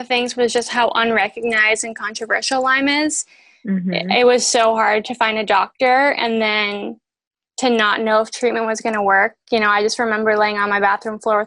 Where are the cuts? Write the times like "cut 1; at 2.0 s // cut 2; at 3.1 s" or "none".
none